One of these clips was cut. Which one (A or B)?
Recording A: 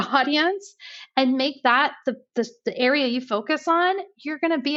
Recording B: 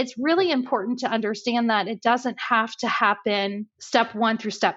B